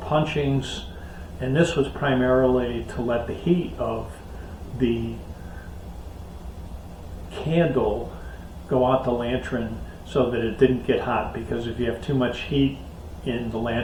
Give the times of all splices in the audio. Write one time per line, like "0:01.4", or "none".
none